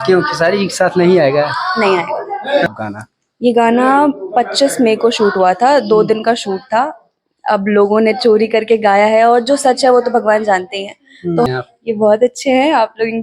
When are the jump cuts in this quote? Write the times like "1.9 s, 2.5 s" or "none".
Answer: 2.7 s, 11.5 s